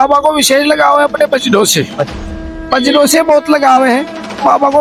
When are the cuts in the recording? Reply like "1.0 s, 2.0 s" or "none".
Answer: none